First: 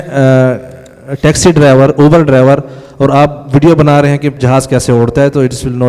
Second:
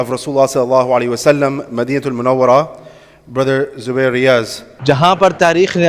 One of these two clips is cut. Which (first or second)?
second